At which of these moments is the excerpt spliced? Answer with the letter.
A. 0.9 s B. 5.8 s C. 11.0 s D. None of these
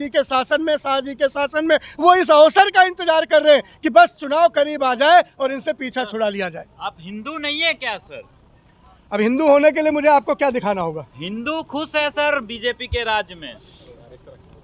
D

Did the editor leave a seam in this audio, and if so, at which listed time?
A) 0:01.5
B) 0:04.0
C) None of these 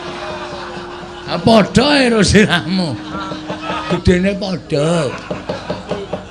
B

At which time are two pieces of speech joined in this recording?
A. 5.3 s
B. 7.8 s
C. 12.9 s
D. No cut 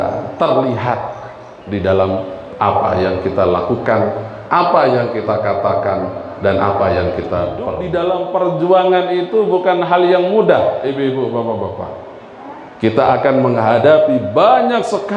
B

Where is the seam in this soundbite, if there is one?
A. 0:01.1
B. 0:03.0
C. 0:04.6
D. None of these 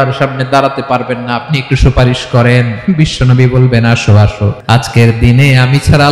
C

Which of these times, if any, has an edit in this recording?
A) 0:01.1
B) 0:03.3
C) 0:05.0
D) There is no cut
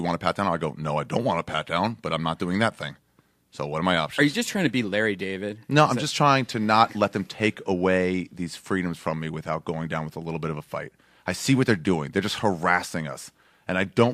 A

